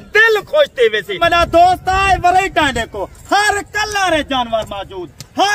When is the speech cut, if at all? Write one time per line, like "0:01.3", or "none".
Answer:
0:01.2